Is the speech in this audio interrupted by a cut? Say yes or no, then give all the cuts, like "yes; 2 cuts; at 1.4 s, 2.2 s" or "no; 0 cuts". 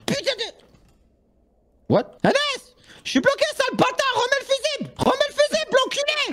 yes; 2 cuts; at 2.1 s, 4.9 s